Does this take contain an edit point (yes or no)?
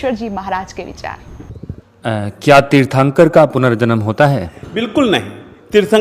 yes